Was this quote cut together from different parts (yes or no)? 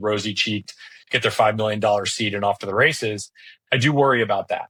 no